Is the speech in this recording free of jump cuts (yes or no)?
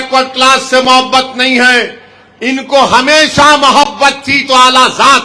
yes